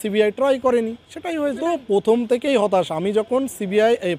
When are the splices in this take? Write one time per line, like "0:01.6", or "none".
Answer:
none